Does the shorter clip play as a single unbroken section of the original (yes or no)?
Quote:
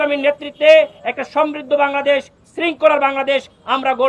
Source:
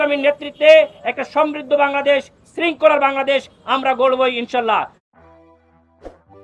yes